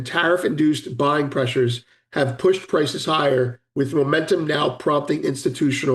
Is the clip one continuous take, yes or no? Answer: yes